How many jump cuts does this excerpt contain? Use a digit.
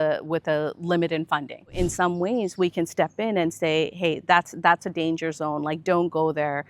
1